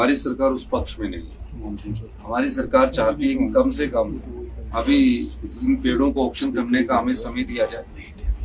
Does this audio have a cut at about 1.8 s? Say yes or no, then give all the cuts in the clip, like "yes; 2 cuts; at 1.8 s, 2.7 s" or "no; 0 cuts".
no; 0 cuts